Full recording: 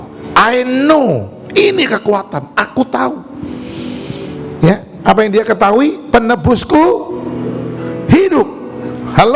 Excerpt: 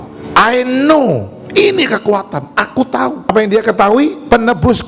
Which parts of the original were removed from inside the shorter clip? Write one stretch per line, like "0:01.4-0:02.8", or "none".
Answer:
0:03.3-0:05.1

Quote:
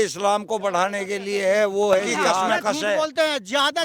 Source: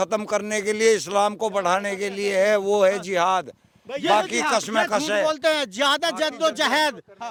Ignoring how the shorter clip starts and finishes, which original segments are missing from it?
0:03.4-0:04.7

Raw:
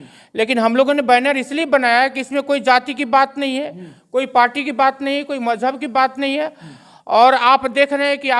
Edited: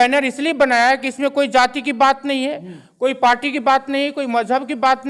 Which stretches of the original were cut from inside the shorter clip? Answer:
none

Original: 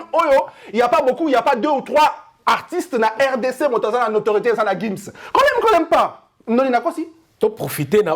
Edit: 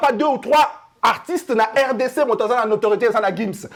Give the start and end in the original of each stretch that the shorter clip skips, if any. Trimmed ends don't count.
none

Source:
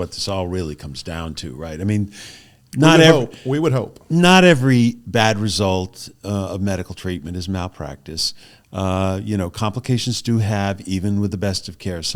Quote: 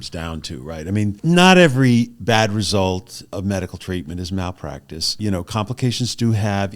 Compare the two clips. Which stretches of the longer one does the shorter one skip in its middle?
0:02.1-0:04.0
0:06.2-0:06.5
0:08.3-0:09.2

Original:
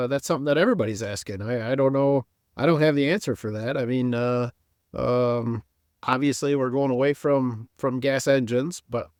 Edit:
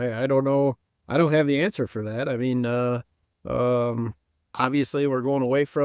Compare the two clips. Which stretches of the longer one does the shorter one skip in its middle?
none

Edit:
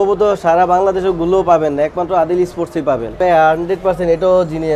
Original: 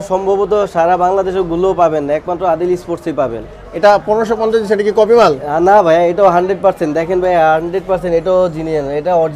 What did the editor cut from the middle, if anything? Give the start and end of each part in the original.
0:03.5-0:07.2

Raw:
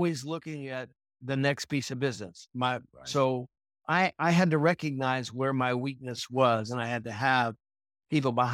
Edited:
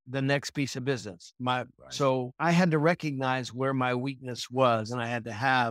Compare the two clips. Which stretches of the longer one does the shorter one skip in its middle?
0:03.5-0:04.2

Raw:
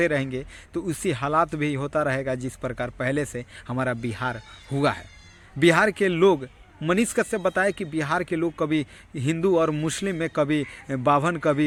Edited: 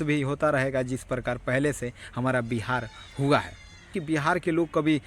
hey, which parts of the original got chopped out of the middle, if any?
0:05.5-0:07.8

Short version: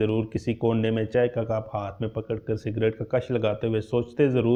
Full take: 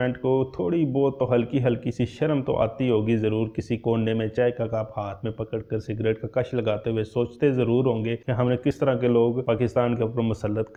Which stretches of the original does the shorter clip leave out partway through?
none

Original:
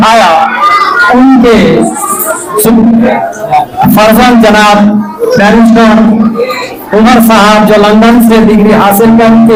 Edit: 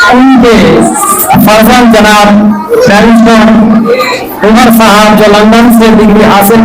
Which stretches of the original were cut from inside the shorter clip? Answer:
0:02.2-0:03.7

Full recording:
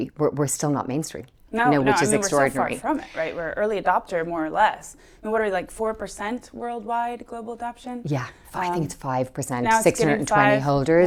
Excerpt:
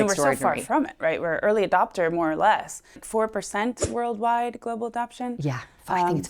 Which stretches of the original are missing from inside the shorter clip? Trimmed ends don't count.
0:05.2-0:05.7

